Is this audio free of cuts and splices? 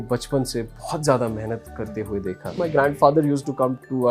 no; 1 cut; at 2.6 s

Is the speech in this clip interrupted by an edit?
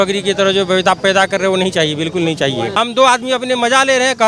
yes; 1 cut; at 2.8 s

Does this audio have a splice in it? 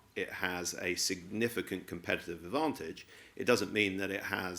no; 0 cuts

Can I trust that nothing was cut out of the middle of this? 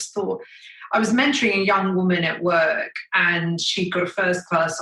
yes; 0 cuts

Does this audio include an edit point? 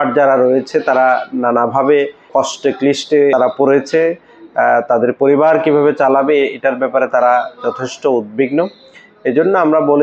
yes; 2 cuts; at 2.3 s, 3.3 s

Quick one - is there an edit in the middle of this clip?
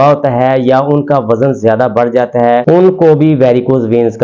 no; 0 cuts

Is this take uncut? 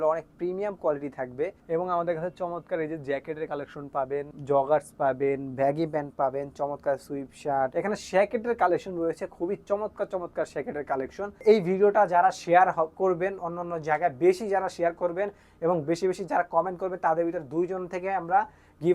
no; 4 cuts; at 1.6 s, 4.3 s, 7.7 s, 11.4 s

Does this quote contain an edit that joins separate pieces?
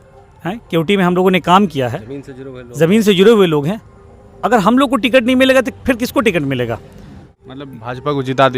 yes; 1 cut; at 7.4 s

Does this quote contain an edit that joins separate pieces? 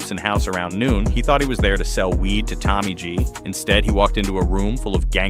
no; 0 cuts

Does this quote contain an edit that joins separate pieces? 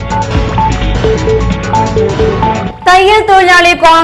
yes; 2 cuts; at 1.2 s, 2.2 s

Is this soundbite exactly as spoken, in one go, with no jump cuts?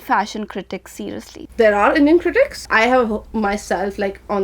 no; 2 cuts; at 1.4 s, 2.6 s

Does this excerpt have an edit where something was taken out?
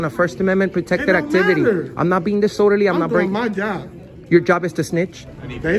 no; 0 cuts

